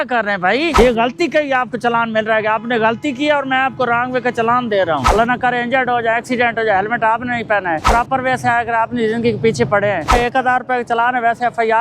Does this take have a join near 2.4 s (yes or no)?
no